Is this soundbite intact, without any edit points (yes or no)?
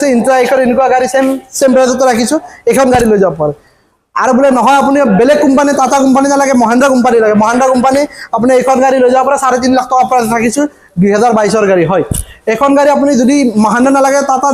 yes